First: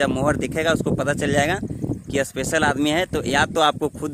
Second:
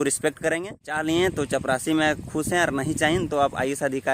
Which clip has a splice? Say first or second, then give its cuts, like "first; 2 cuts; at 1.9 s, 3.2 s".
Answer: second; 1 cut; at 0.9 s